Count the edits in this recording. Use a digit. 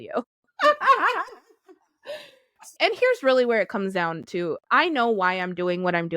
2